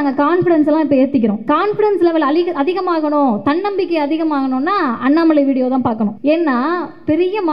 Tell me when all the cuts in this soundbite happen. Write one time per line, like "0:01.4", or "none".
0:01.4
0:06.2